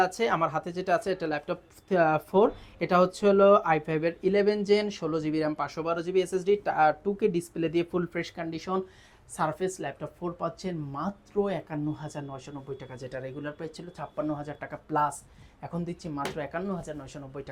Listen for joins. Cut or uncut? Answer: uncut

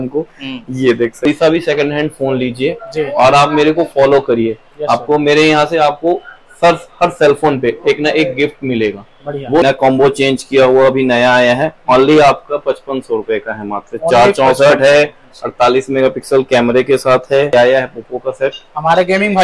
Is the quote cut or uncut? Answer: cut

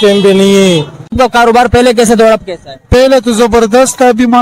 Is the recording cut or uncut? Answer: cut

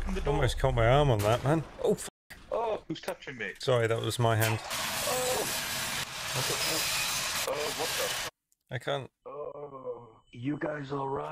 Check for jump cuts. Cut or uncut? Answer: uncut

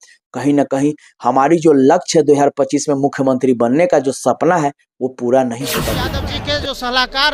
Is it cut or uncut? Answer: cut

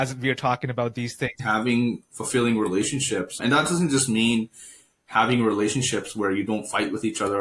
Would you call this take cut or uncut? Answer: cut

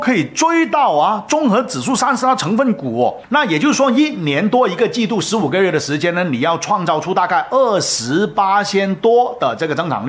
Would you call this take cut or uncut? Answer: cut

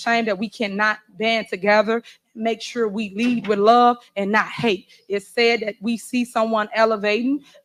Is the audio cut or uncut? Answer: uncut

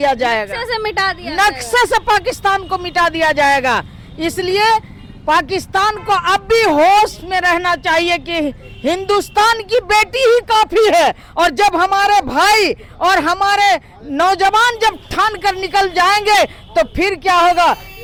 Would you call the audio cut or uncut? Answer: uncut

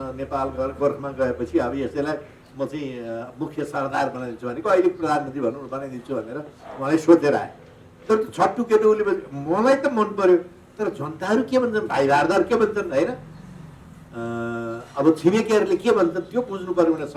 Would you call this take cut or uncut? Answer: uncut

